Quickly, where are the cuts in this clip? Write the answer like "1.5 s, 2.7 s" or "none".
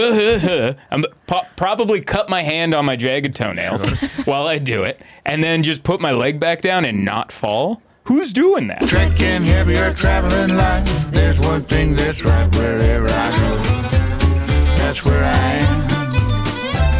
8.8 s

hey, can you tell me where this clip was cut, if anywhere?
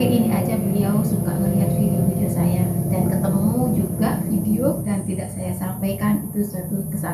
4.8 s

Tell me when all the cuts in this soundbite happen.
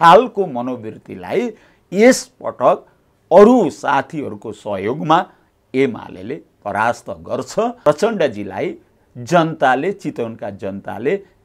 7.8 s

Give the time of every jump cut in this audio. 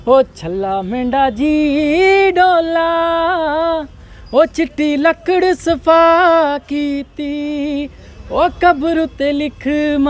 none

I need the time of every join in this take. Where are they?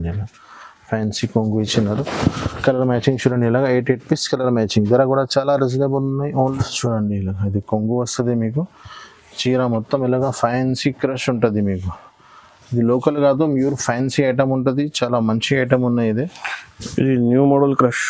6.3 s

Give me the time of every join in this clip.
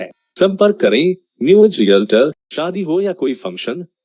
2.5 s

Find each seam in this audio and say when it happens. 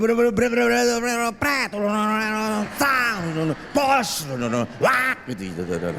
none

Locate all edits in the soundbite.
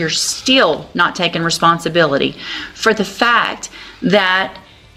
none

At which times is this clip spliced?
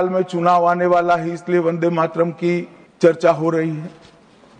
2.8 s

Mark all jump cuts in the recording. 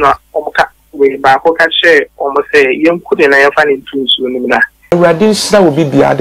4.7 s

